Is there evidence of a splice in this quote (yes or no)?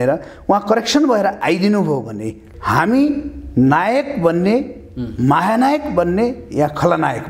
yes